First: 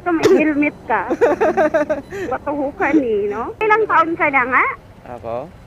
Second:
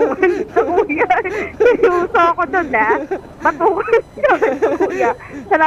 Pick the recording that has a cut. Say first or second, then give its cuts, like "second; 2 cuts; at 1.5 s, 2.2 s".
first; 1 cut; at 3.6 s